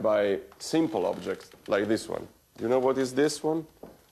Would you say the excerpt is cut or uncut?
cut